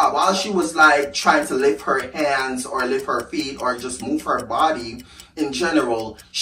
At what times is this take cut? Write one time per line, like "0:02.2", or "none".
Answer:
none